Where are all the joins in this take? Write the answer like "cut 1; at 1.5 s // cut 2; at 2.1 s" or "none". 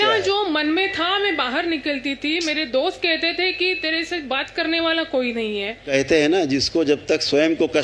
cut 1; at 5.9 s